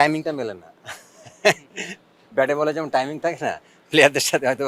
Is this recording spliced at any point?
no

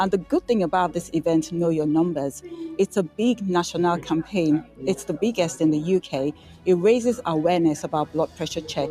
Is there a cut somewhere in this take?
no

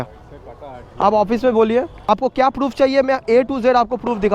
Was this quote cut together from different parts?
yes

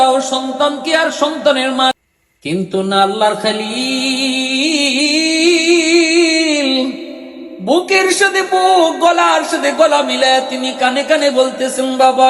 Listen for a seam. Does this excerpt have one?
yes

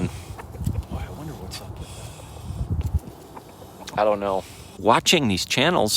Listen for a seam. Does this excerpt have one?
yes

